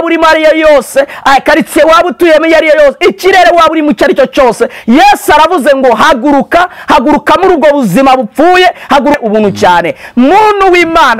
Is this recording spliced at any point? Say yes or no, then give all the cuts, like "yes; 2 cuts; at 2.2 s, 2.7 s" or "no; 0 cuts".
yes; 1 cut; at 9.2 s